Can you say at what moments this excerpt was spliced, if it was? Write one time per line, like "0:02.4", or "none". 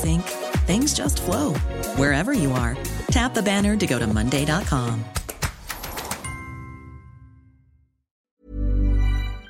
0:08.1